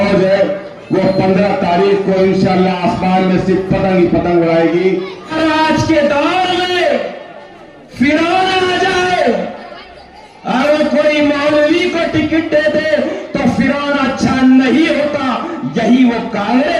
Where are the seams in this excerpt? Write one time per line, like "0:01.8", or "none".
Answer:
0:05.3